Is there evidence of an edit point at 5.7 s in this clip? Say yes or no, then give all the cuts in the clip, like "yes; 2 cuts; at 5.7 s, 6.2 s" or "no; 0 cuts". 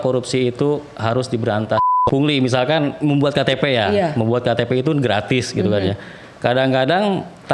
no; 1 cut; at 1.9 s